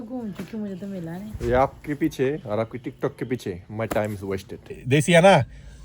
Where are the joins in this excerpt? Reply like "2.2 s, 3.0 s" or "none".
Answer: 4.8 s